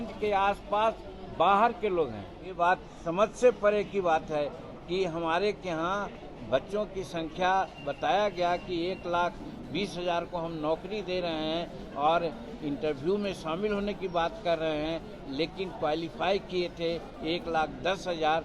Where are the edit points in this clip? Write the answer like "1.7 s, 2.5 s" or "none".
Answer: 2.5 s